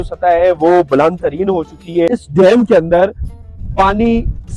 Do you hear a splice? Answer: yes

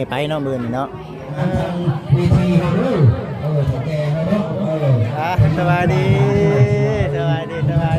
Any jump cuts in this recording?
yes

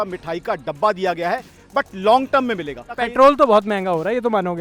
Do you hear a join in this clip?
yes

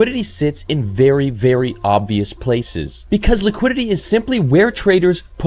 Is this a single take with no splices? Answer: yes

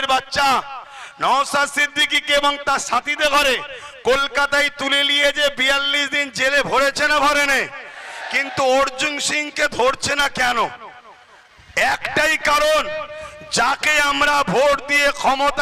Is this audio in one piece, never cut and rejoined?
yes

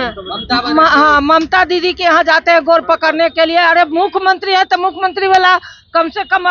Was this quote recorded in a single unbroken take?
yes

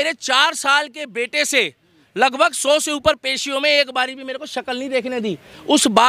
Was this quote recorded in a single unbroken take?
yes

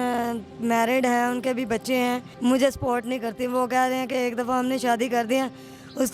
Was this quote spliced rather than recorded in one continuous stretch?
yes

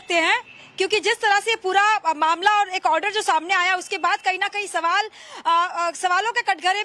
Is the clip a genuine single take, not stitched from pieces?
no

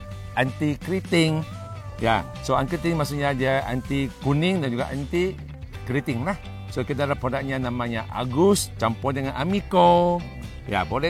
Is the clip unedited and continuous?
yes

